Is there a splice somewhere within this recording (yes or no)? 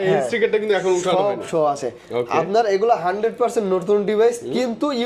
no